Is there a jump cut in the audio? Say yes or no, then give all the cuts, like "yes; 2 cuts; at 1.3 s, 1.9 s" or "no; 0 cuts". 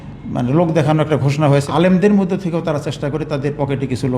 yes; 1 cut; at 1.7 s